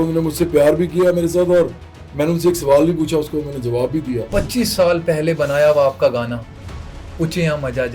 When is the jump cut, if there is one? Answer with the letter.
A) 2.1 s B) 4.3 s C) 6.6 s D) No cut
B